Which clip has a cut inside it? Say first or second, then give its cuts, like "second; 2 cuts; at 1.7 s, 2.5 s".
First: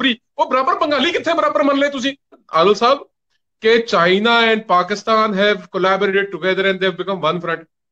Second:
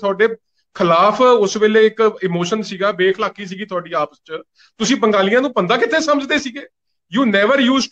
first; 1 cut; at 2.4 s